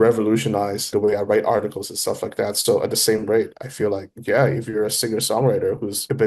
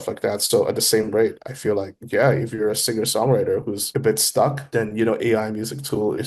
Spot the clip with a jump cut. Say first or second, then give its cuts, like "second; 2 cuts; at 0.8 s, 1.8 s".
first; 1 cut; at 0.9 s